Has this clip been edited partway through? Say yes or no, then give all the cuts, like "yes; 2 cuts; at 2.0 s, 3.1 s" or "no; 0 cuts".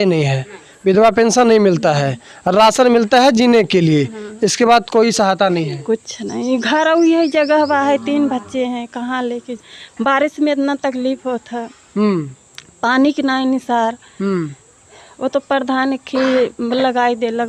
no; 0 cuts